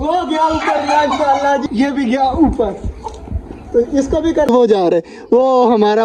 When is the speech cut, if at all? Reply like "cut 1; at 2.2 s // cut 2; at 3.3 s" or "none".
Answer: cut 1; at 1.6 s // cut 2; at 4.5 s